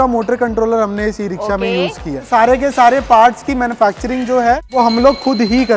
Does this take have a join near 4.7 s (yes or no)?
yes